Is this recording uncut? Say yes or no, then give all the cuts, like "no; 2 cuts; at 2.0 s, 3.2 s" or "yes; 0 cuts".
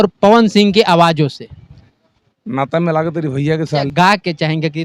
yes; 0 cuts